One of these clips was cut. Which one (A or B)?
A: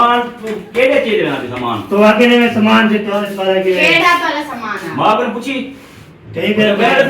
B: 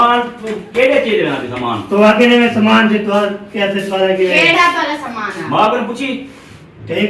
A